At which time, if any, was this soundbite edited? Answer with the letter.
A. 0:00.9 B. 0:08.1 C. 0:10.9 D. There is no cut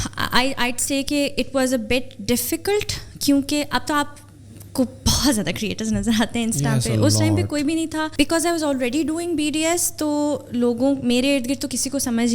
B